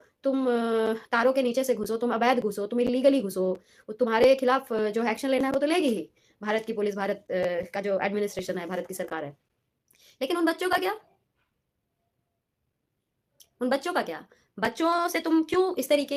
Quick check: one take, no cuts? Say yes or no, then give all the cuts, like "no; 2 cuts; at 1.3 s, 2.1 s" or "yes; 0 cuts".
yes; 0 cuts